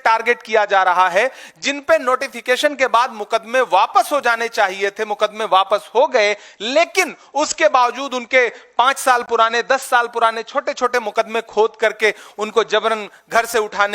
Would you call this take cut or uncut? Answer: uncut